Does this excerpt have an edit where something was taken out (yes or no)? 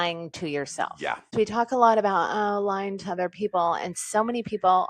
yes